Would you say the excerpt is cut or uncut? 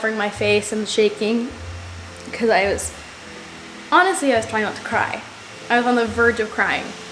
uncut